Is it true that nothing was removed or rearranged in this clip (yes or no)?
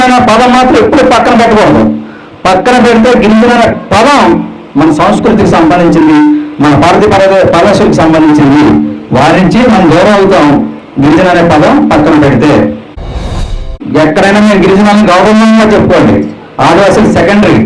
no